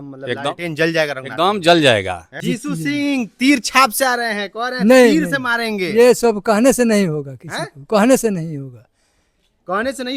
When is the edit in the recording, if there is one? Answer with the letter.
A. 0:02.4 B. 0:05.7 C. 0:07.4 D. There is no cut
A